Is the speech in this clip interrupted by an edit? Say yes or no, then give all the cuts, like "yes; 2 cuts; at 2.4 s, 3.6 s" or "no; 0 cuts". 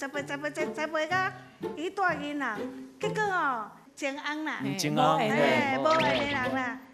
no; 0 cuts